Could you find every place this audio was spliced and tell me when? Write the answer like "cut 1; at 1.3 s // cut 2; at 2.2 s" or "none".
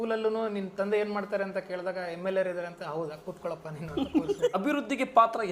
cut 1; at 4.5 s